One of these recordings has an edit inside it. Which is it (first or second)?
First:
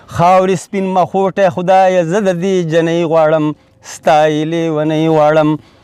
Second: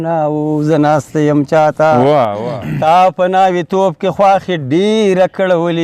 second